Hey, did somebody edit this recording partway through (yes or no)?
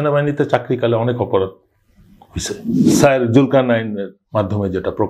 yes